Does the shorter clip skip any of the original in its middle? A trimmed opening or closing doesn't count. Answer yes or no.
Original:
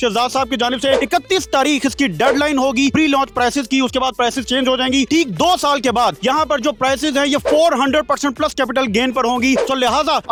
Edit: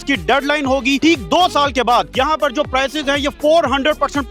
yes